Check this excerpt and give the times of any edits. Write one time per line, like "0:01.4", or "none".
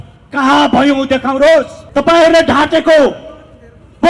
0:01.8

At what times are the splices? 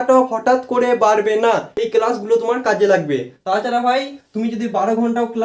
0:01.7

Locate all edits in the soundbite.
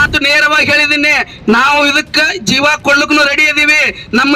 0:01.0

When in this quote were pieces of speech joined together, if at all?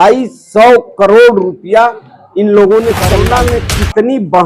0:03.3

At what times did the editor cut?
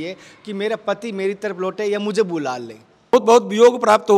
0:03.1

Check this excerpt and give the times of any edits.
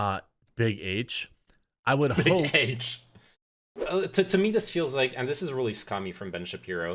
0:03.7

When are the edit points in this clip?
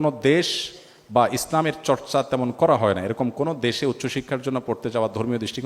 none

